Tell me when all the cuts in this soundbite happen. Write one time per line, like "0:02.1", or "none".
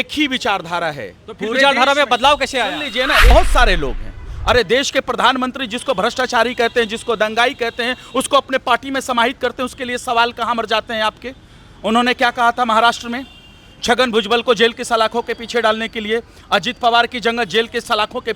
0:03.3

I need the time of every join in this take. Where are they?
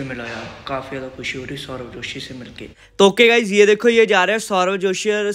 0:02.8

